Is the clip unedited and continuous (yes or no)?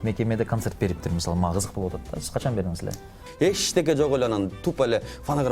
no